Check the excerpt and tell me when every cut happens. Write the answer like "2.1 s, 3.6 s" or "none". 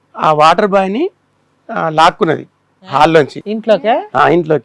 none